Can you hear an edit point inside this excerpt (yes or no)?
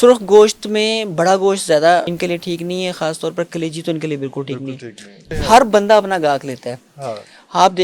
yes